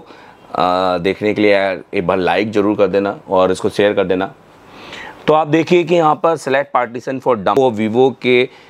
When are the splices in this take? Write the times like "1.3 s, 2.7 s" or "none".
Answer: 7.6 s

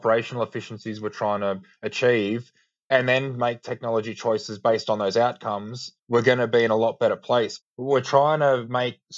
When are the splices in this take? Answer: 7.6 s

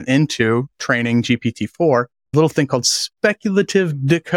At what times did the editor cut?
2.3 s

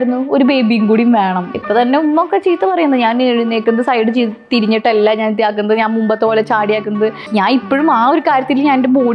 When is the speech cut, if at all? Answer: 1.5 s, 7.2 s

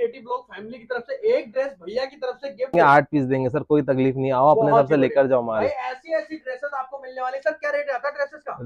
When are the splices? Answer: 2.7 s

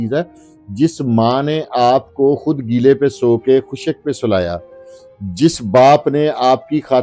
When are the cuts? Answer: none

